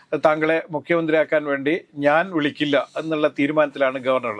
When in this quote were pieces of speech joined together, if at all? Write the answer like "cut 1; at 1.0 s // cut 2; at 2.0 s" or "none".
none